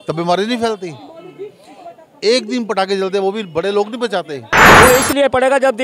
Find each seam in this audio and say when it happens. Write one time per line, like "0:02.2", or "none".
0:04.7